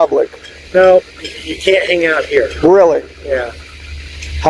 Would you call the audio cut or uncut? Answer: uncut